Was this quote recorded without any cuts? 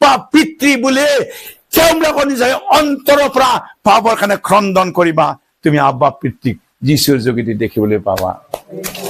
yes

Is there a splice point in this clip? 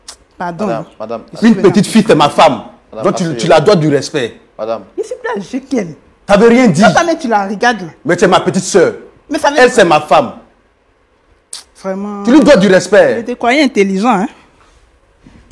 no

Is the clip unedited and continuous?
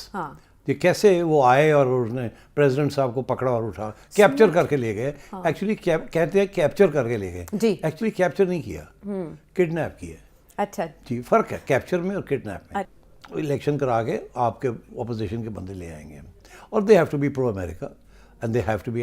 no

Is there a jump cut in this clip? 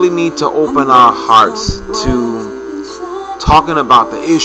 yes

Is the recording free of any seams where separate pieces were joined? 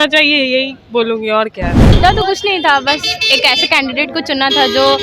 no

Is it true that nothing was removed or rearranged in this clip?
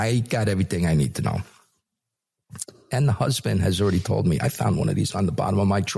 yes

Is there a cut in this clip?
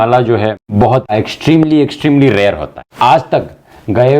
yes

